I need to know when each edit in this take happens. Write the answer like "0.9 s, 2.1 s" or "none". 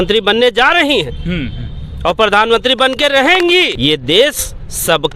3.7 s